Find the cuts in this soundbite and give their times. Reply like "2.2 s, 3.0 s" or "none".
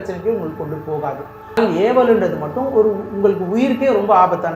1.6 s